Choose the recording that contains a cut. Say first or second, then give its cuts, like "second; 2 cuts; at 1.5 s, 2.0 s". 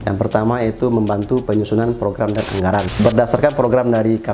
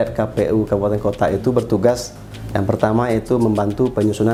first; 1 cut; at 2.9 s